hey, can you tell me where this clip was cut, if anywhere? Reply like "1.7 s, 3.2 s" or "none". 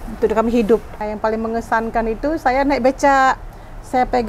0.9 s